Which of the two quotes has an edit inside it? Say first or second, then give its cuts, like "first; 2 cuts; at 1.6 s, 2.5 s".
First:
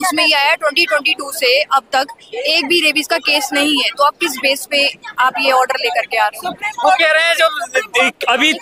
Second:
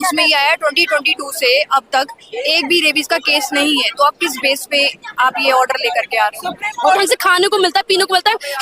second; 1 cut; at 7.0 s